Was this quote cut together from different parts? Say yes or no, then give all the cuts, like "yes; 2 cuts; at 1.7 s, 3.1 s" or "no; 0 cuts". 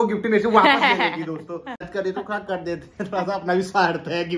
yes; 1 cut; at 1.9 s